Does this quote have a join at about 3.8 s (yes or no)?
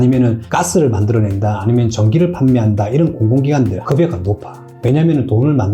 yes